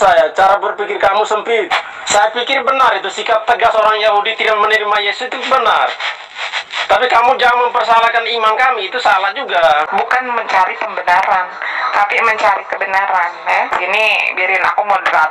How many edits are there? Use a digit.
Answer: 3